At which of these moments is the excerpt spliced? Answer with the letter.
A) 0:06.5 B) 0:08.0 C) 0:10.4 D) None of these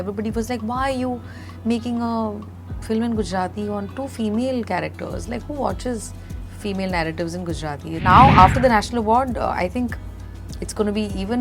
B